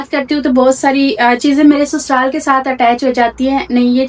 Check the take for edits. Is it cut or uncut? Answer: uncut